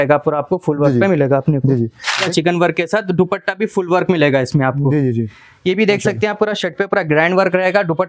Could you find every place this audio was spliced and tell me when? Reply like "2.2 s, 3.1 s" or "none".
2.3 s